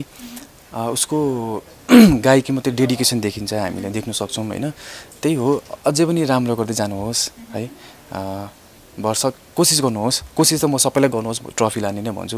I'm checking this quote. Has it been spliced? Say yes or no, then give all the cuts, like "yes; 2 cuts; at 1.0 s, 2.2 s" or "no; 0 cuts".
no; 0 cuts